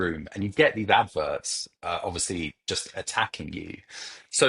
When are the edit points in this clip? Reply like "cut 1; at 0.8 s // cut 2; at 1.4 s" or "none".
none